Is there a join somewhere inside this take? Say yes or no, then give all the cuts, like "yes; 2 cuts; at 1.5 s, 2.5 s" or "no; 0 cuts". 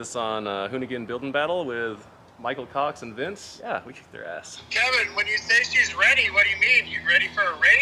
yes; 1 cut; at 4.4 s